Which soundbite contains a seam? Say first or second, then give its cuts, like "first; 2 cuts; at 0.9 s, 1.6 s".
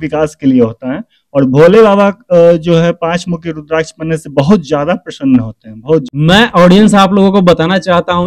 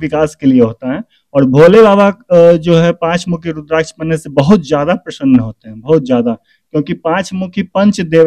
first; 1 cut; at 6.0 s